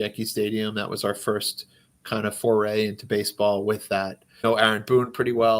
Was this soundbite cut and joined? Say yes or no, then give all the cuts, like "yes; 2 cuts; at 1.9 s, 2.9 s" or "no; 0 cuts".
yes; 1 cut; at 4.4 s